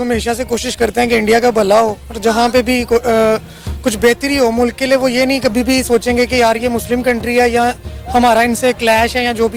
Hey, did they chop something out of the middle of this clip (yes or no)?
no